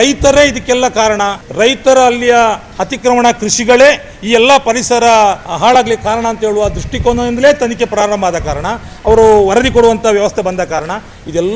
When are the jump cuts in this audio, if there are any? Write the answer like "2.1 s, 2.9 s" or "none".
1.4 s, 5.5 s